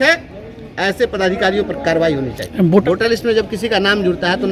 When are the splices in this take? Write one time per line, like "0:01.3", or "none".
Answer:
0:02.8